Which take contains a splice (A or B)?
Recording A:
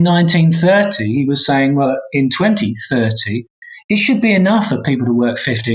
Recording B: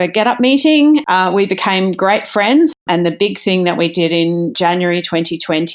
B